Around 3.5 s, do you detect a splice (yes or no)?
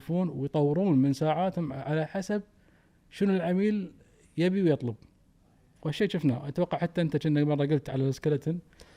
no